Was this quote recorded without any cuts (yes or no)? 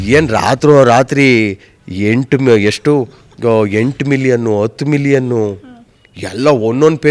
yes